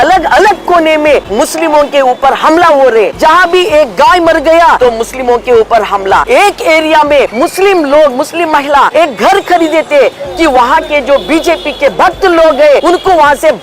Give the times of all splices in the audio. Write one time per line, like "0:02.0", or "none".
0:01.3
0:03.1
0:04.8
0:06.2
0:07.3
0:08.9
0:12.8